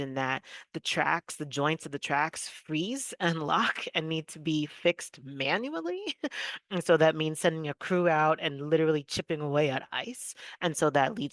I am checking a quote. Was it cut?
no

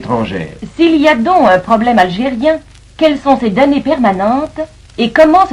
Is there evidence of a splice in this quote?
yes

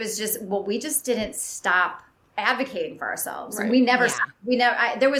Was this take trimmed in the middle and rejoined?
no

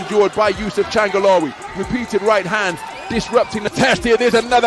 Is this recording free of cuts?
no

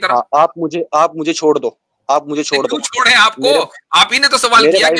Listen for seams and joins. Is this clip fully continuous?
yes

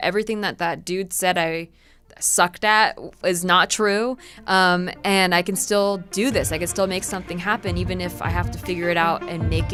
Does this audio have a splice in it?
no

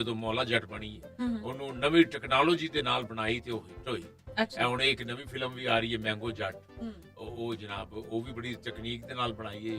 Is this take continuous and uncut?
yes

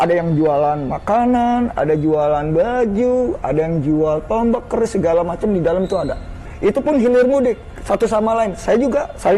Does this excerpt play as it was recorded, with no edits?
no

